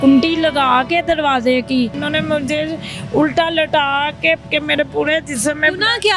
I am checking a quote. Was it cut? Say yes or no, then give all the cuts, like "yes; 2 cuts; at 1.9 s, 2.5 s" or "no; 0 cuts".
yes; 2 cuts; at 2.0 s, 4.4 s